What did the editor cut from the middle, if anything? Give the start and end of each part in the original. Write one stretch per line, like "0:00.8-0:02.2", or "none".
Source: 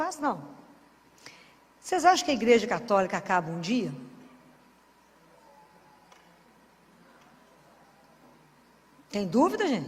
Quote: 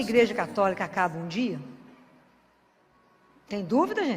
0:05.2-0:08.5